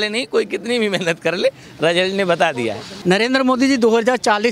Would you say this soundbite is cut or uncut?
cut